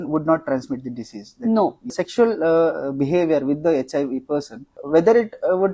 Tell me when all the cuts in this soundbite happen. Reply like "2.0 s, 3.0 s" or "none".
2.0 s, 4.7 s